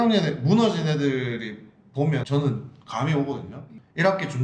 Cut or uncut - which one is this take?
uncut